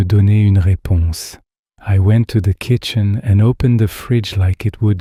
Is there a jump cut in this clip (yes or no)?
no